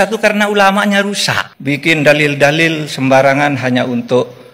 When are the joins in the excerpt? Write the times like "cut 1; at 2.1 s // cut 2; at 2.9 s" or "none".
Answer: cut 1; at 1.5 s